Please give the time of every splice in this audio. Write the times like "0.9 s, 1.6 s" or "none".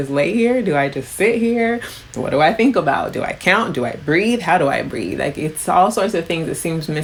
none

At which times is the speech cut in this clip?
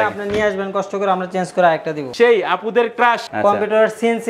2.1 s, 3.3 s

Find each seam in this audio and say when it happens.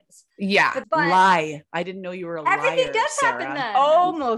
none

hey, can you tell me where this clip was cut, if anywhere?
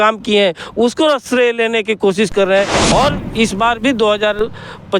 2.8 s

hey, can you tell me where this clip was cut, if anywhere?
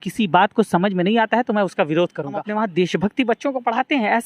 2.4 s

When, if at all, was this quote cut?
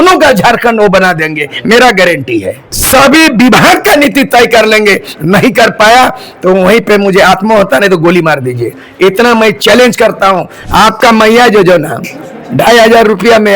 2.7 s, 10.5 s

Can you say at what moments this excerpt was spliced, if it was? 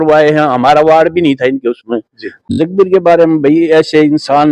2.3 s

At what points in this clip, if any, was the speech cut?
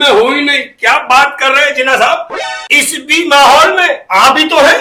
none

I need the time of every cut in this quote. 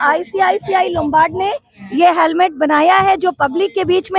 none

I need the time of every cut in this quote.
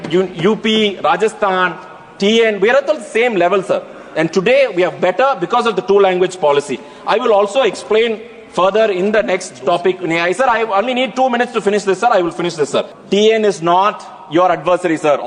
13.0 s

